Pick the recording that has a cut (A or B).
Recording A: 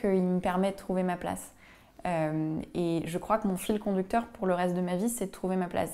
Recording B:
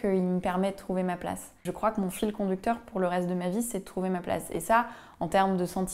B